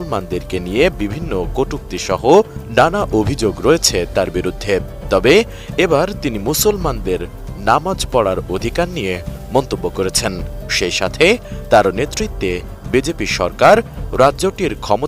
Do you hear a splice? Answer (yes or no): no